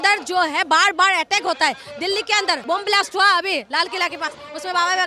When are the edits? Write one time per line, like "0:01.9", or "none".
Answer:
0:02.6